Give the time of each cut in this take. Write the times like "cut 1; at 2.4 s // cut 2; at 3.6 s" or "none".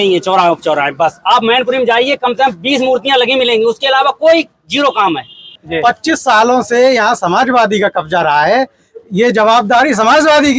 cut 1; at 5.6 s